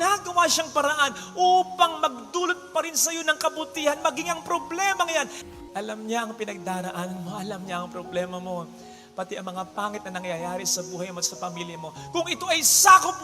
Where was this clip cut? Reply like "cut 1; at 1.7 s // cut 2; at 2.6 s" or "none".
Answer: cut 1; at 5.3 s